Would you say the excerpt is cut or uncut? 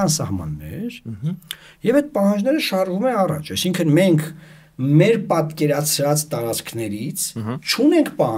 uncut